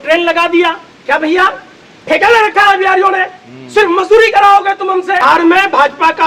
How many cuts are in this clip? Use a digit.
1